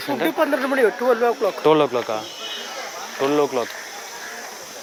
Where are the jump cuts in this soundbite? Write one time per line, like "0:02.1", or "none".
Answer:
none